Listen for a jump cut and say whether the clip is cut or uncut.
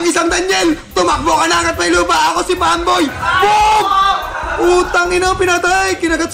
uncut